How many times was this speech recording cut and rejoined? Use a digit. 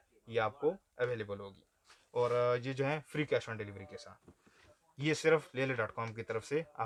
0